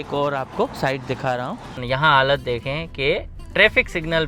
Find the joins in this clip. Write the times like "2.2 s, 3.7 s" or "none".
1.7 s